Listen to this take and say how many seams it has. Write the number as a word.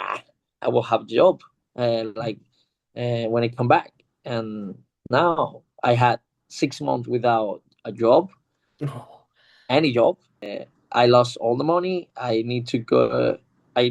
one